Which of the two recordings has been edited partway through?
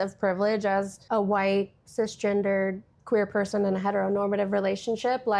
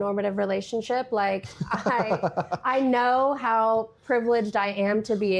first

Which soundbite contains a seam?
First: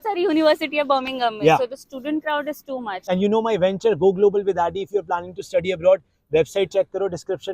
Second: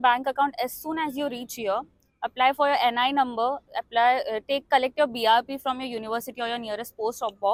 first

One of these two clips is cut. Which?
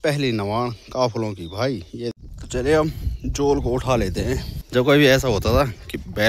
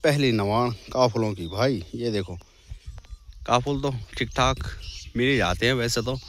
first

